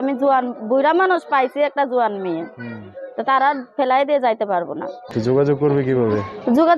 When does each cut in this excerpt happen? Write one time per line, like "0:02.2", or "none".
0:05.1